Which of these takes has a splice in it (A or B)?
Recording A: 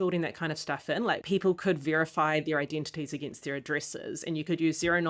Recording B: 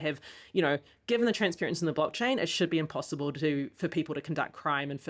A